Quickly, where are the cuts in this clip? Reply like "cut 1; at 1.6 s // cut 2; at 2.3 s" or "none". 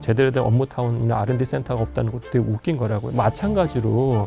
cut 1; at 3.1 s

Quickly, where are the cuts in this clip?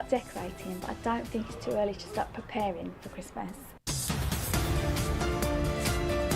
cut 1; at 3.6 s

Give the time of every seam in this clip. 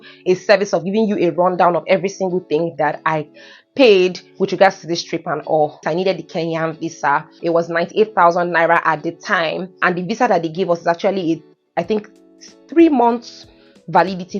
cut 1; at 5.8 s // cut 2; at 7.3 s // cut 3; at 9.7 s

